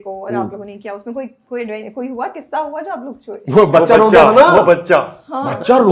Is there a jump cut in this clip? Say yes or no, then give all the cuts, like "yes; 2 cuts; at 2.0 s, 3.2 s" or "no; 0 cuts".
no; 0 cuts